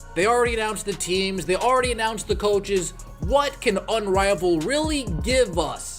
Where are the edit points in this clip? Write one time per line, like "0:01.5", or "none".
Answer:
none